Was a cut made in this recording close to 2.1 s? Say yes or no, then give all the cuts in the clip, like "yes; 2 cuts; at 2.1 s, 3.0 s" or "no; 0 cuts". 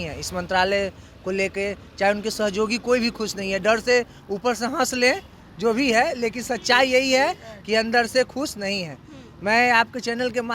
no; 0 cuts